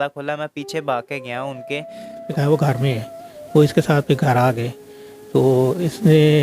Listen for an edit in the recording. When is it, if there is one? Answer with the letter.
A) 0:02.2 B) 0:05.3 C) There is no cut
A